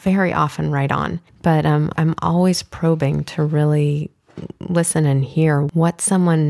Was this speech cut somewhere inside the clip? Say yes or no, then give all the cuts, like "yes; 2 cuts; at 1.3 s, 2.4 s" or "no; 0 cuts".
yes; 3 cuts; at 1.2 s, 1.9 s, 5.7 s